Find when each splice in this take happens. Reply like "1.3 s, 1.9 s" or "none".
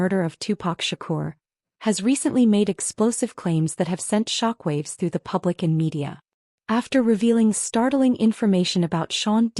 2.0 s